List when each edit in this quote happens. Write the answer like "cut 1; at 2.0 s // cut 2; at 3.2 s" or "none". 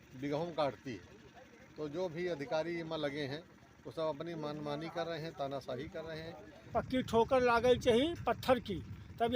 cut 1; at 6.7 s